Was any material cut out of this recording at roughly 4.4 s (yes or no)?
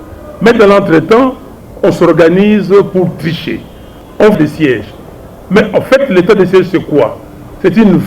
yes